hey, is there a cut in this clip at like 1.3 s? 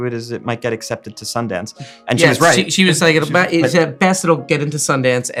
no; 0 cuts

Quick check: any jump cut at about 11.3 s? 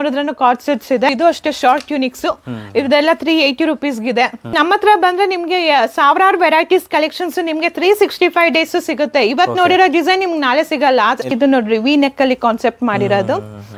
yes; 3 cuts; at 1.1 s, 4.5 s, 11.3 s

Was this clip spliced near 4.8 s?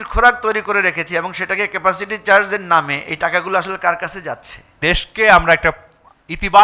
yes; 1 cut; at 4.8 s

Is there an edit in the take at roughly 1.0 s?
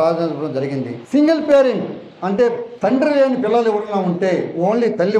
yes; 1 cut; at 1.0 s

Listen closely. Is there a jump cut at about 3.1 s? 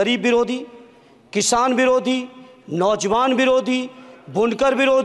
no; 0 cuts

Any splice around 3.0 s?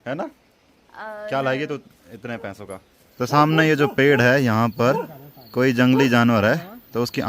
yes; 1 cut; at 3.0 s

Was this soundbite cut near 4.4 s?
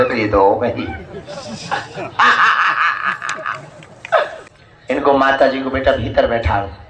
yes; 1 cut; at 4.4 s

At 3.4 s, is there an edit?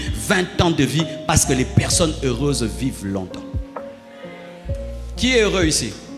yes; 2 cuts; at 3.4 s, 5.2 s

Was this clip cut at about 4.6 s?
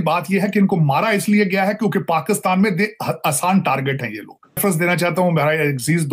yes; 1 cut; at 4.6 s

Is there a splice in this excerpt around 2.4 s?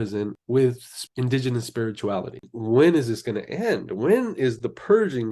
yes; 1 cut; at 2.4 s

